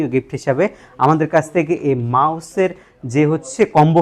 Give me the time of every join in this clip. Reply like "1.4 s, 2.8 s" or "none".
none